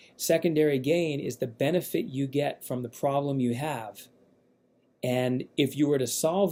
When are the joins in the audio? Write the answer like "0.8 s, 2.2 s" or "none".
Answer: none